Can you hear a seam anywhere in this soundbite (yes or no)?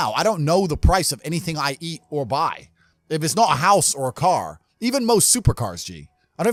no